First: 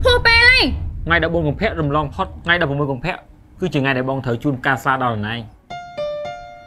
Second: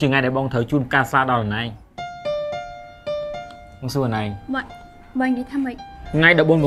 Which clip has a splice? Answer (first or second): first